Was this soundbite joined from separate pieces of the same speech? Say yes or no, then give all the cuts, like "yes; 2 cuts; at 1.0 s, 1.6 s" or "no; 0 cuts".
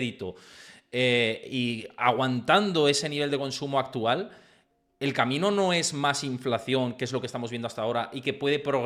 no; 0 cuts